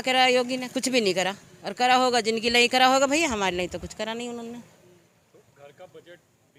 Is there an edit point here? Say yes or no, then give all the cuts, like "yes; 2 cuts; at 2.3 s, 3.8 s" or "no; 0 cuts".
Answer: no; 0 cuts